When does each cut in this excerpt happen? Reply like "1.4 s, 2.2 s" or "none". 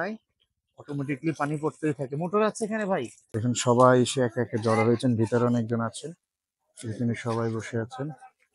3.2 s